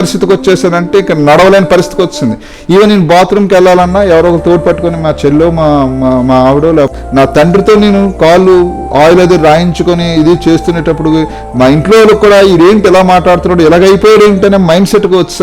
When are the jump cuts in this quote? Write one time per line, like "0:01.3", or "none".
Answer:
0:07.0

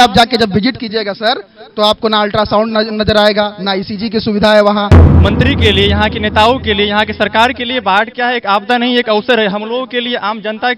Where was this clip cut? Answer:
0:05.0

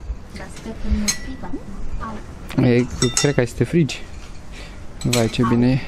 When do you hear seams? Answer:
none

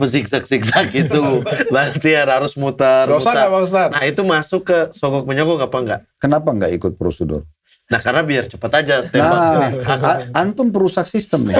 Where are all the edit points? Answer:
0:06.1

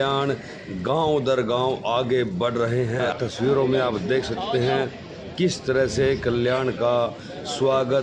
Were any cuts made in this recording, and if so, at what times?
0:03.1

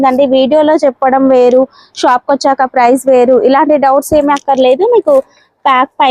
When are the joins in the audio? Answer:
none

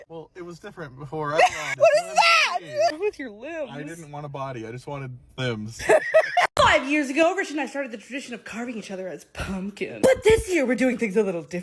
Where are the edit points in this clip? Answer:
0:06.5

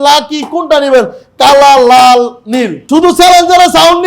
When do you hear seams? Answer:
0:02.8

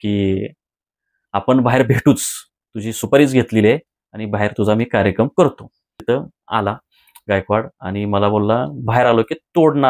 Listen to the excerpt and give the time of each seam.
0:06.0

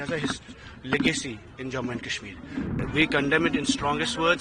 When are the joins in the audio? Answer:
0:02.8

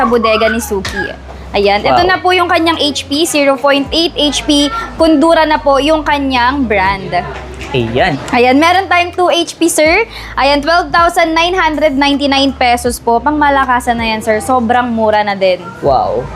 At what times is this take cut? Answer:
0:08.2

